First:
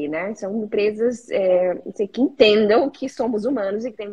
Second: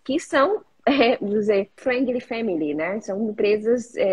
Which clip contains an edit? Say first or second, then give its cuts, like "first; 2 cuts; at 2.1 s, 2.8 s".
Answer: second; 1 cut; at 1.7 s